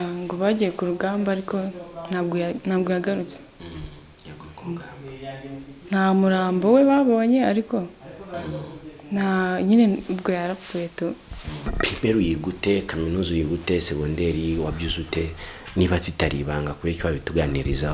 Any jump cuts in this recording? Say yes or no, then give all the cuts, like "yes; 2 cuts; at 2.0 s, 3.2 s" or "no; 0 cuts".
yes; 1 cut; at 11.7 s